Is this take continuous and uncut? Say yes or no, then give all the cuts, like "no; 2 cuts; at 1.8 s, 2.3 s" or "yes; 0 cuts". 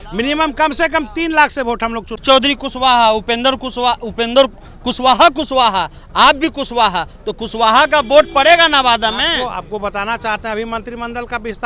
no; 1 cut; at 2.2 s